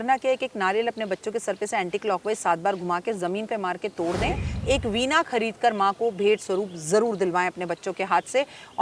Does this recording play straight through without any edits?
no; 1 cut; at 4.5 s

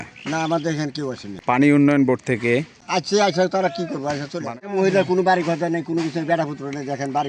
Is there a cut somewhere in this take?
yes; 3 cuts; at 1.3 s, 2.8 s, 4.5 s

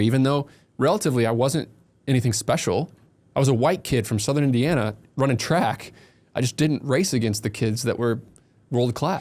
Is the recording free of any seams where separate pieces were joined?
yes; 0 cuts

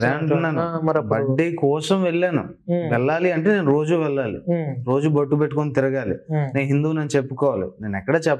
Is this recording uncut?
yes; 0 cuts

